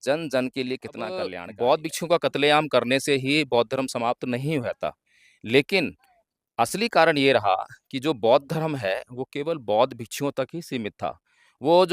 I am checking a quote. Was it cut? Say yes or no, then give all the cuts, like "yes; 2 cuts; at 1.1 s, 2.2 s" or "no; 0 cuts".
yes; 1 cut; at 1.4 s